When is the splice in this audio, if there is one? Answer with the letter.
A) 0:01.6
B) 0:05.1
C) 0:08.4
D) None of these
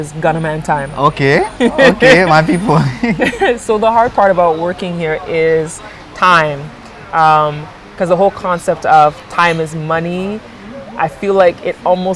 D